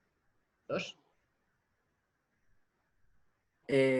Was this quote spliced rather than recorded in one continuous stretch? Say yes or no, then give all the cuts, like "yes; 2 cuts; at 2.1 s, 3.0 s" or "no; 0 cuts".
no; 0 cuts